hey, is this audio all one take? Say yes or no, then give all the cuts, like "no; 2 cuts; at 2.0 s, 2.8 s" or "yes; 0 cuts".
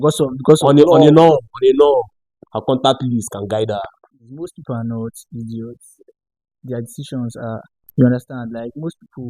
no; 1 cut; at 4.0 s